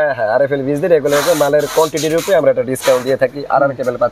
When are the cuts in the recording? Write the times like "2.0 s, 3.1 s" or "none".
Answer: none